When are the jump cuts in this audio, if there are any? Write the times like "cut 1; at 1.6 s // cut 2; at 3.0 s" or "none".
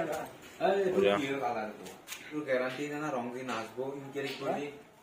cut 1; at 2.2 s